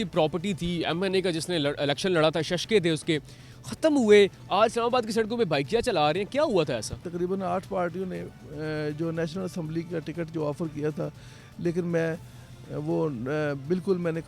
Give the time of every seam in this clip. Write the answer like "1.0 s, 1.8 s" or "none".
7.1 s